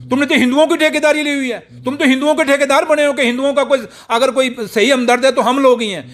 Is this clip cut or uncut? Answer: uncut